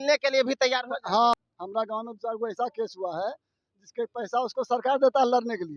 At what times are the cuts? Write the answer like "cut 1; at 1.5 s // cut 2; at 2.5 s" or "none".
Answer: cut 1; at 1.3 s